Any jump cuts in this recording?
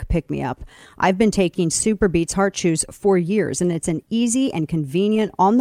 no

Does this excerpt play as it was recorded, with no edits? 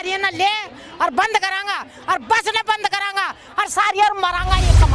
yes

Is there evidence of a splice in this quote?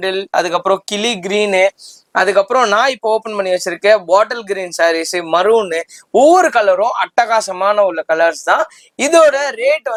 no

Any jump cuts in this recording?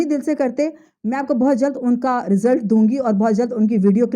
no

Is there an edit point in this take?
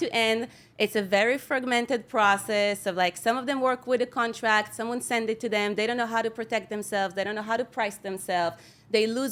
no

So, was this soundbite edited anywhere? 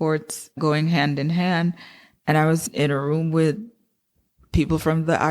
yes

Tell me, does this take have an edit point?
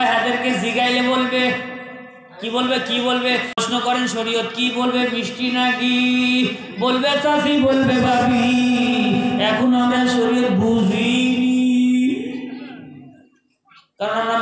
yes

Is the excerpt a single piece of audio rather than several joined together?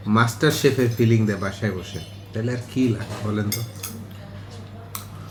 yes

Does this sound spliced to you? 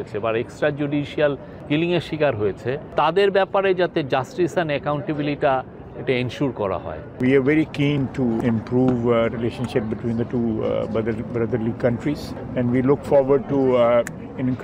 yes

